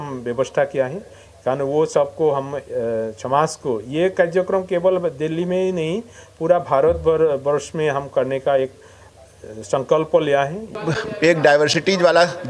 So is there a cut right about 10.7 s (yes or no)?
yes